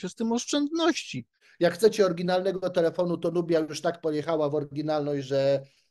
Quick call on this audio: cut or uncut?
cut